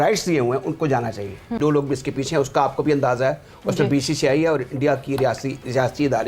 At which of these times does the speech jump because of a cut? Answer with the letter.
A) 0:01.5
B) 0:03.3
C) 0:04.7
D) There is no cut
A